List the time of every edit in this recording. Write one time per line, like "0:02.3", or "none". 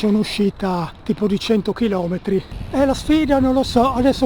0:02.6